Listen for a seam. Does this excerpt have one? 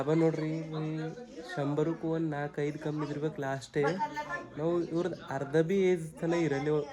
no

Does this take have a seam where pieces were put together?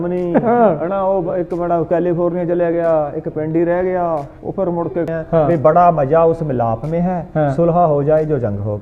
yes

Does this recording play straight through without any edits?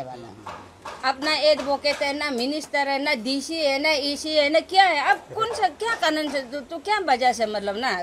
yes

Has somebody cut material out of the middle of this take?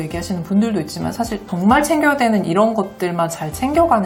no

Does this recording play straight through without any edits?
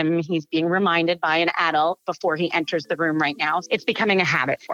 no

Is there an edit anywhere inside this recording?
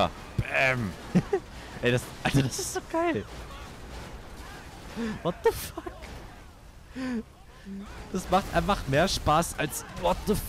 no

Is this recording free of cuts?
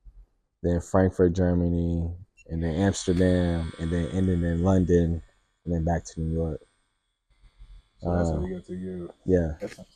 yes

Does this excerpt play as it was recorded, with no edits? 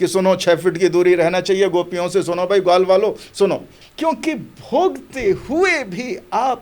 no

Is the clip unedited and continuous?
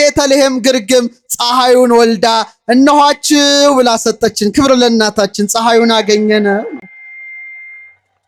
yes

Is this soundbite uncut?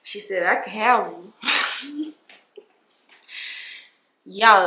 yes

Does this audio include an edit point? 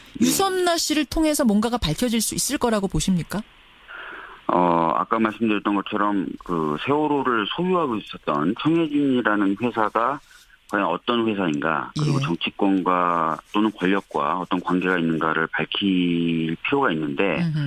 yes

